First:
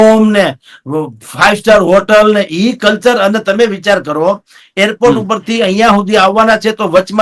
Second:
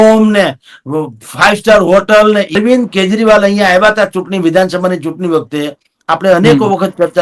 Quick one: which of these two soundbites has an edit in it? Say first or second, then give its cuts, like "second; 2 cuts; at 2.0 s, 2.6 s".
second; 1 cut; at 2.5 s